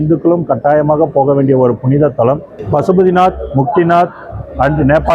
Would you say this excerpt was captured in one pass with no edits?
no; 1 cut; at 2.5 s

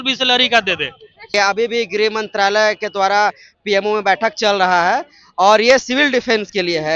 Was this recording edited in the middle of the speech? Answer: yes; 1 cut; at 1.3 s

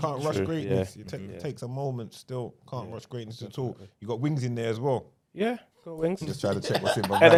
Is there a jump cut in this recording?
no; 0 cuts

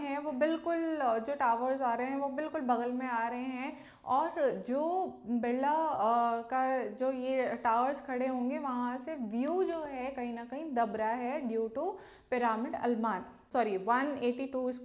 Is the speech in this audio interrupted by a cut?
yes; 1 cut; at 13.3 s

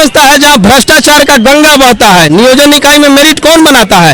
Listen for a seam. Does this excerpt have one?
no; 0 cuts

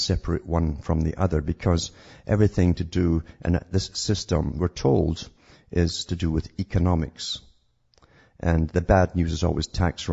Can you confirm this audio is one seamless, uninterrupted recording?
yes; 0 cuts

